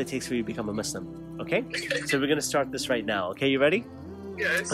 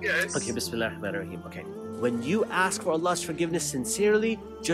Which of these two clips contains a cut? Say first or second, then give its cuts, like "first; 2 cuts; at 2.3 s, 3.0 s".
second; 1 cut; at 1.5 s